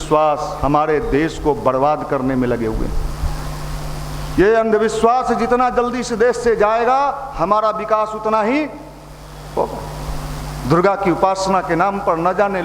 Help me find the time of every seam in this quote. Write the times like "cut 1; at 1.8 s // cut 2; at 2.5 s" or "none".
none